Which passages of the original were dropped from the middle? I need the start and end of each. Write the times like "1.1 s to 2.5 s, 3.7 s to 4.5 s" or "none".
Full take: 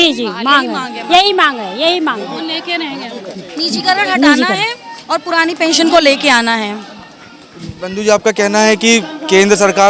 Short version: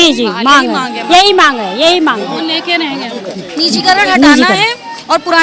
none